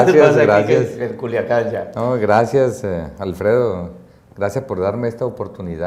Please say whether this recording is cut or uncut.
uncut